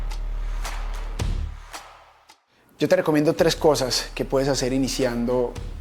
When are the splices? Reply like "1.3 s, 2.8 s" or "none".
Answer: 2.6 s

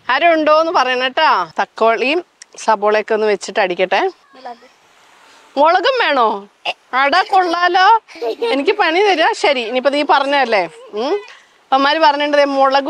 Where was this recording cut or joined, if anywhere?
1.5 s

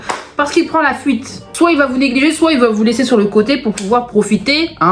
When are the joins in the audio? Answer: 1.4 s

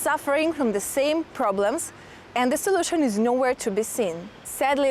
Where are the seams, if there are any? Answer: none

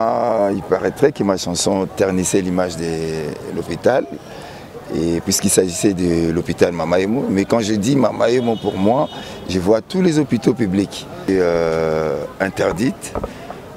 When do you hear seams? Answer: 11.3 s

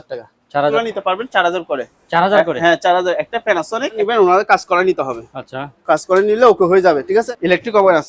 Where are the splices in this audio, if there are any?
0.7 s, 4.0 s, 7.3 s

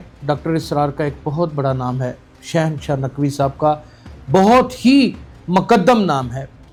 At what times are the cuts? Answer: none

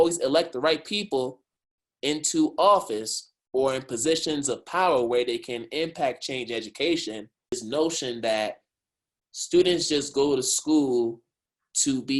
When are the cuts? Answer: 7.6 s

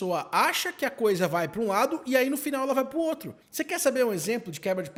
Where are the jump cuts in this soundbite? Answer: none

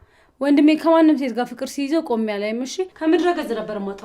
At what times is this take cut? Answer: none

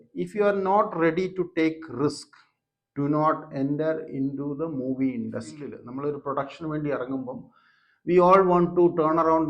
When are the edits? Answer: 5.8 s

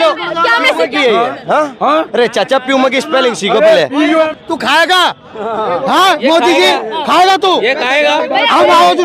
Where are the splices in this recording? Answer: 4.1 s

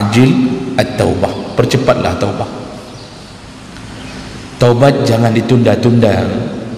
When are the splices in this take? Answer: none

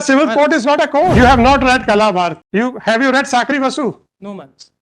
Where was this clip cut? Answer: 1.1 s, 2.4 s

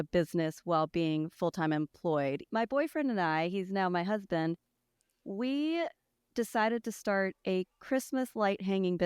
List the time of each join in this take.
2.4 s

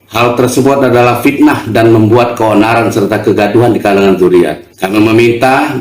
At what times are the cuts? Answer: 4.7 s

